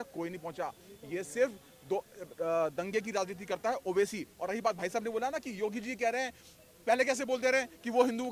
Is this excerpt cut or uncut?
uncut